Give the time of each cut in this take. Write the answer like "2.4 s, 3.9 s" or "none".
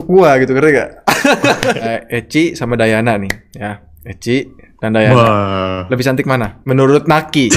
2.0 s